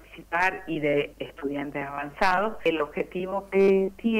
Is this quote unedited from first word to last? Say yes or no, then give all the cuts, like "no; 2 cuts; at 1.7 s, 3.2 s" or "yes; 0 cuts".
no; 1 cut; at 2.7 s